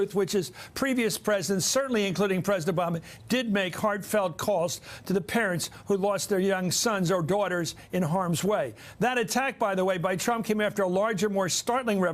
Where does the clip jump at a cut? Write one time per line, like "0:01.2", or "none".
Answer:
0:10.7